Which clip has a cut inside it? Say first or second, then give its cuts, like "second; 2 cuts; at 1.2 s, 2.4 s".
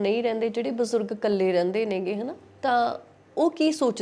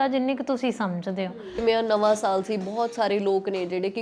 second; 1 cut; at 1.6 s